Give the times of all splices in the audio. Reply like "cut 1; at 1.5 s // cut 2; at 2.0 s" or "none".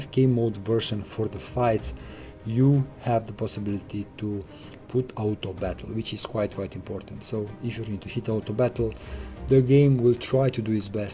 none